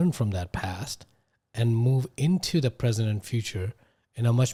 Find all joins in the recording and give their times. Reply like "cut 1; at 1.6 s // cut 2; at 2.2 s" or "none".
none